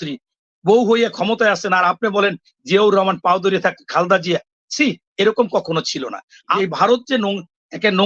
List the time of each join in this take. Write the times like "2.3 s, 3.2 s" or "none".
6.4 s